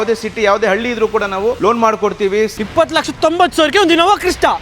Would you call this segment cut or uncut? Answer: cut